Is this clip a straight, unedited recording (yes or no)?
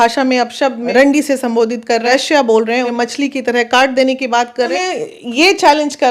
no